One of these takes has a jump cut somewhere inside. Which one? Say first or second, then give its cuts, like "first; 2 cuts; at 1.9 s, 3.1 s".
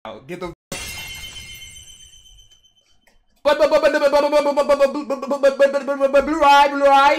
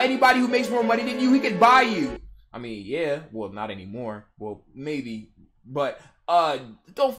first; 1 cut; at 3.4 s